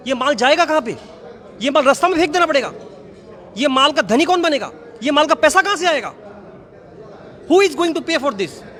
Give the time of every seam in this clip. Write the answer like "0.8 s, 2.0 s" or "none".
none